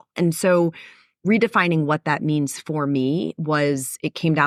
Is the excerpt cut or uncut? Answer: uncut